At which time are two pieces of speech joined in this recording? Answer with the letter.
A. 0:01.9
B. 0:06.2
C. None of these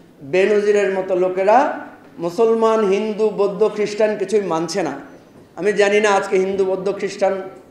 C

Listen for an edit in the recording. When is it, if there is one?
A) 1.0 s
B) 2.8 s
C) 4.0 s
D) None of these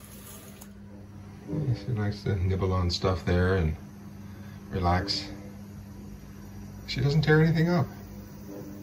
A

